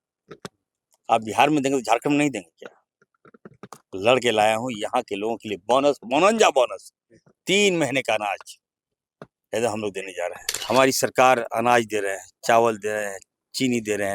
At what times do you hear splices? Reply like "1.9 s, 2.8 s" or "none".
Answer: 10.5 s